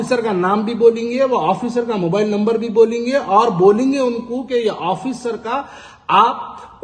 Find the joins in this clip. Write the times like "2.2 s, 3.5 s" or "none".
none

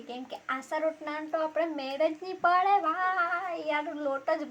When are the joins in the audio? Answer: none

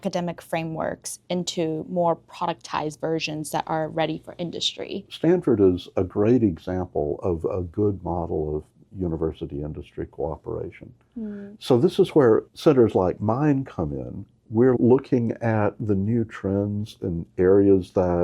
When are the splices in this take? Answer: 5.0 s, 11.5 s, 14.8 s

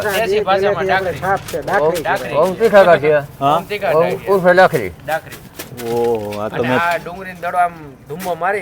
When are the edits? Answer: none

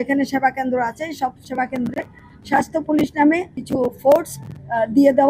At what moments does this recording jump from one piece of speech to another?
none

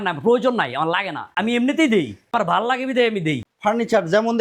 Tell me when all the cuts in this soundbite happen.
1.3 s, 2.3 s, 3.4 s

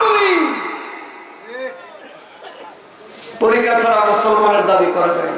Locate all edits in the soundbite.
none

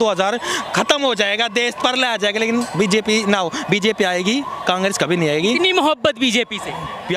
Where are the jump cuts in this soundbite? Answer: none

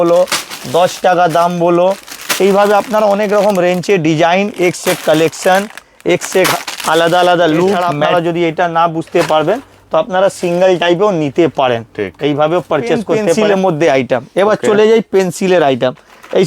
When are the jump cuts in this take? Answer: 7.9 s, 13.4 s

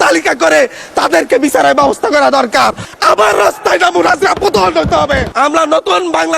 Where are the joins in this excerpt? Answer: 2.9 s, 5.3 s

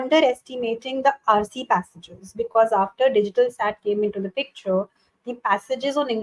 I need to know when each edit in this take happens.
none

